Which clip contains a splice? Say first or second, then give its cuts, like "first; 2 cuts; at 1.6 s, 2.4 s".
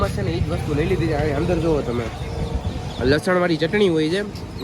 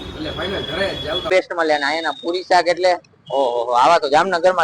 second; 1 cut; at 1.3 s